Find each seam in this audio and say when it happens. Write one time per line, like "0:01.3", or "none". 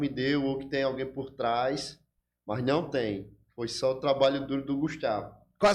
none

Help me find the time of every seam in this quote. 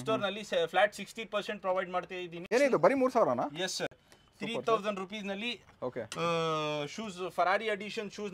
0:02.4

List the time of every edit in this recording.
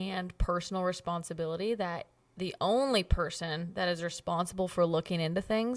none

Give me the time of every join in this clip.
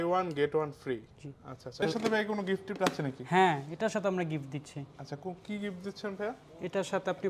0:01.8

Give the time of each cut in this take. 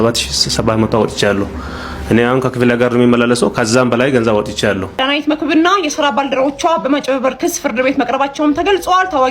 0:05.0

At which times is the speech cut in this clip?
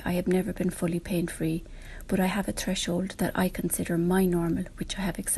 none

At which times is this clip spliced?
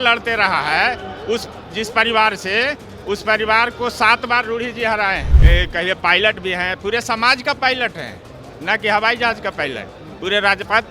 0:05.3

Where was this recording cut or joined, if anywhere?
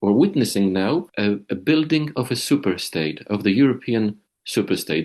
0:01.1

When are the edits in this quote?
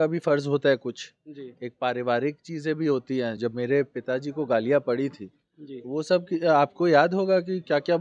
none

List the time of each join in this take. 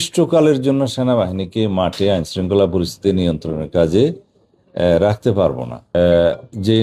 0:05.8

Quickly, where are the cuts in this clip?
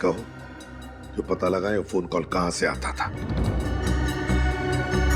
0:03.6

